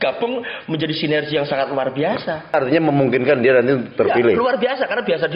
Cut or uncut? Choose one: cut